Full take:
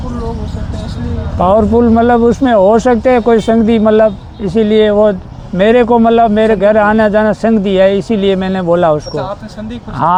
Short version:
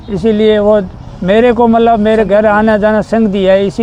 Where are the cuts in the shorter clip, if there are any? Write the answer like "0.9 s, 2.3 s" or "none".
none